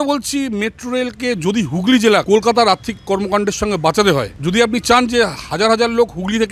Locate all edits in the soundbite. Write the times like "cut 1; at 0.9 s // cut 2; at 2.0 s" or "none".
cut 1; at 2.2 s // cut 2; at 4.3 s